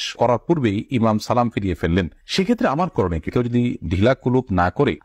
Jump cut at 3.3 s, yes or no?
yes